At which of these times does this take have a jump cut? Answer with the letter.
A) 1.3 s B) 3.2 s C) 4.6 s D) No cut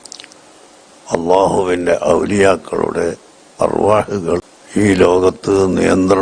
C